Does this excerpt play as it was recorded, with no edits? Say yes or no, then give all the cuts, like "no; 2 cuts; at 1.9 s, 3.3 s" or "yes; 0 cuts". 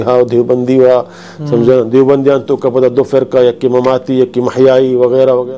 yes; 0 cuts